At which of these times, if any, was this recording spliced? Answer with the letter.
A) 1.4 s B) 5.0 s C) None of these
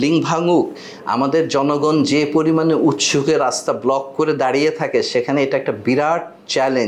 C